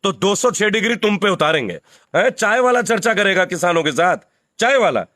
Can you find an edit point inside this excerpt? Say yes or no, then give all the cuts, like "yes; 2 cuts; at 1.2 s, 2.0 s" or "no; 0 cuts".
yes; 1 cut; at 1.9 s